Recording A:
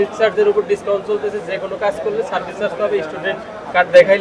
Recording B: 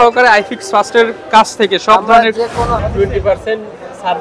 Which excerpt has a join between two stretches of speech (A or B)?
B